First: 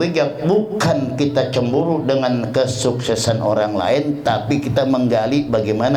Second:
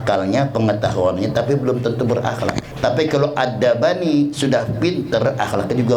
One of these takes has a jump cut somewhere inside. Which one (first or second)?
second